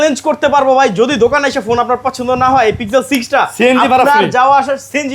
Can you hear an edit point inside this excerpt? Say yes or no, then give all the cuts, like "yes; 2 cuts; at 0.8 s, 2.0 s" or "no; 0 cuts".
no; 0 cuts